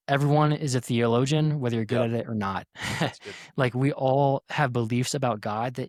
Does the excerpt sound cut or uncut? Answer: uncut